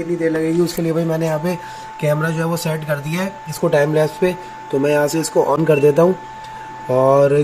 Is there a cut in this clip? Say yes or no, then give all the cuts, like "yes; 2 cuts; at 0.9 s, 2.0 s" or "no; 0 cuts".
no; 0 cuts